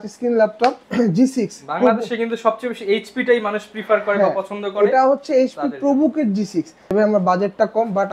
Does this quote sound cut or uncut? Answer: cut